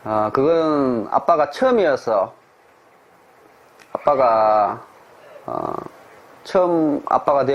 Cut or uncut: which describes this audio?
uncut